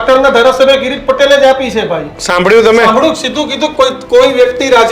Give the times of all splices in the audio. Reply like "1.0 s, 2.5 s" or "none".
2.1 s